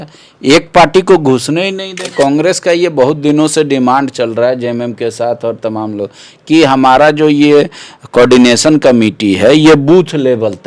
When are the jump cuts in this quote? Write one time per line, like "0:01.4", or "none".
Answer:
0:02.1